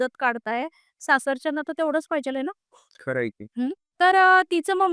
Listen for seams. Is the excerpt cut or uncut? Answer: uncut